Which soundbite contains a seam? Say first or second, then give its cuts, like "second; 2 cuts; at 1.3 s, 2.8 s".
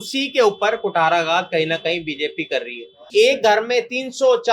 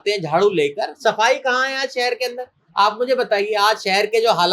first; 1 cut; at 2.9 s